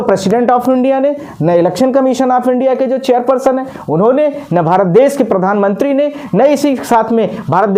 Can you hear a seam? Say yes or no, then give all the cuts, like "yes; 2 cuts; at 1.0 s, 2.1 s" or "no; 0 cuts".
no; 0 cuts